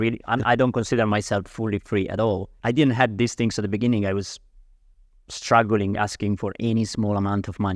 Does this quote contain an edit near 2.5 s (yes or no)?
yes